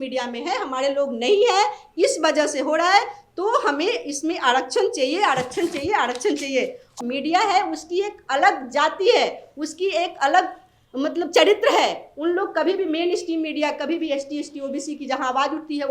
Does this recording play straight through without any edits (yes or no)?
no